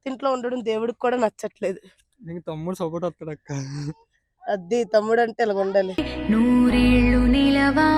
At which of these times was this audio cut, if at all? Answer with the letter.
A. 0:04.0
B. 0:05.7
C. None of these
C